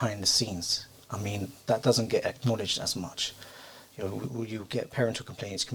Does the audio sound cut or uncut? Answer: uncut